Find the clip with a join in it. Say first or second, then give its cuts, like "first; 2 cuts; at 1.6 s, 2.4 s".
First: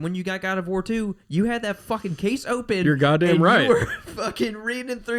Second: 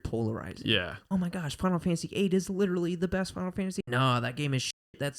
second; 2 cuts; at 1.0 s, 3.8 s